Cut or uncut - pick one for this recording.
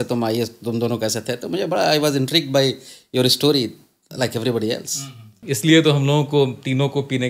cut